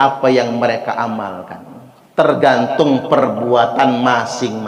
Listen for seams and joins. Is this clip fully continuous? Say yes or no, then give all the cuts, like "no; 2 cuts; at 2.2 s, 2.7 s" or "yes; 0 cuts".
yes; 0 cuts